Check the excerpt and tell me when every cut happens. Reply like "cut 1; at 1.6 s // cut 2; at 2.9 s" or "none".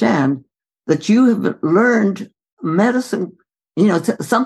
cut 1; at 2.3 s